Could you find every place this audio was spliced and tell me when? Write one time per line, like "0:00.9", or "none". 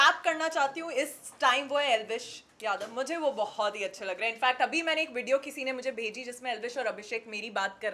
none